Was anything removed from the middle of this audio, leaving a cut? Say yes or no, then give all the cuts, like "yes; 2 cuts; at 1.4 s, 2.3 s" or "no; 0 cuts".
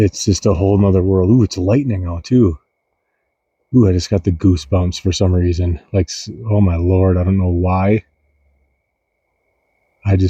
no; 0 cuts